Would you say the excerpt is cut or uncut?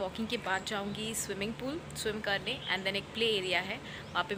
uncut